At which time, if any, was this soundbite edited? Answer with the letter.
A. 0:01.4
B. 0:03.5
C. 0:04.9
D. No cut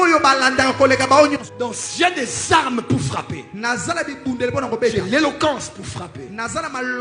A